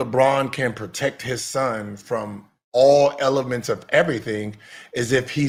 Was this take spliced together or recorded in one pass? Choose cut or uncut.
uncut